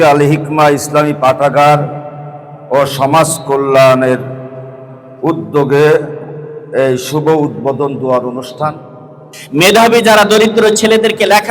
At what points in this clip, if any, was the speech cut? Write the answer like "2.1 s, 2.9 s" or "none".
9.3 s